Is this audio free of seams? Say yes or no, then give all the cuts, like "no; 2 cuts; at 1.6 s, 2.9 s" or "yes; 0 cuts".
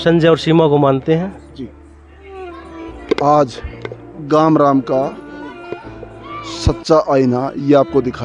yes; 0 cuts